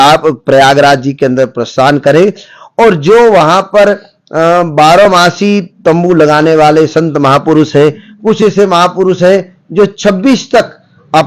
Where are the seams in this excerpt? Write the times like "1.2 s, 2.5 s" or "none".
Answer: none